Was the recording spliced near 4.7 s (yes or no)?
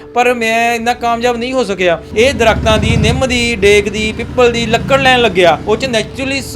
no